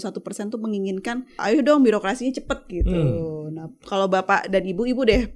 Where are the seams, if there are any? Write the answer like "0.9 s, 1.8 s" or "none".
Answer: 1.4 s